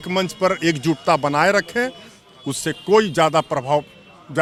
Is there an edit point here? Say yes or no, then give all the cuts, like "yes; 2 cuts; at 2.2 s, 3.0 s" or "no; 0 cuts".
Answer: no; 0 cuts